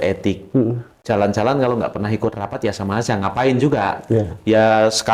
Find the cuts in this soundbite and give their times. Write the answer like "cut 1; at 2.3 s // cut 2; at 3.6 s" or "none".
none